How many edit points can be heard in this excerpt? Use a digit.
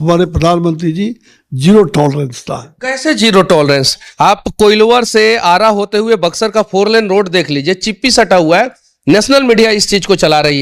0